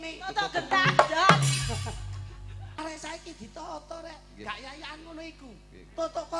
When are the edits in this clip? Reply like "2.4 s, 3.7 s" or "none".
2.8 s